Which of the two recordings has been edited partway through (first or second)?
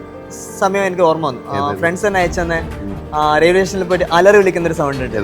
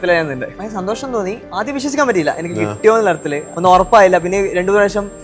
second